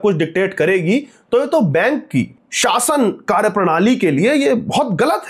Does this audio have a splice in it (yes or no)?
yes